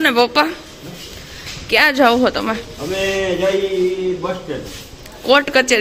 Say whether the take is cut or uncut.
uncut